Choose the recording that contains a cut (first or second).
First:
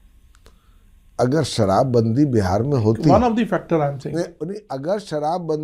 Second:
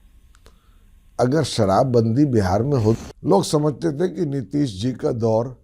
second